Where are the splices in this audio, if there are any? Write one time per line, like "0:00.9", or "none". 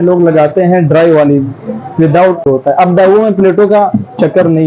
0:02.4